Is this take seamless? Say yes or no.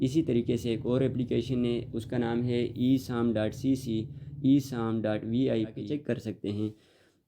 no